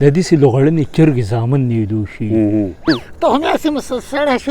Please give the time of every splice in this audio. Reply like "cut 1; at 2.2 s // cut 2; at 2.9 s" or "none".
cut 1; at 2.8 s